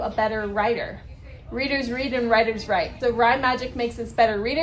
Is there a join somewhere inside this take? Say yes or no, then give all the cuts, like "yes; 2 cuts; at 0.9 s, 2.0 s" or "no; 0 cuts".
no; 0 cuts